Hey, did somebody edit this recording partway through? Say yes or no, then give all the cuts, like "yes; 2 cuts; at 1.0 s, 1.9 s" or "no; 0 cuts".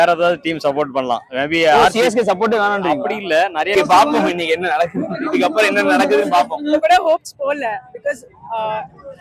yes; 1 cut; at 3.7 s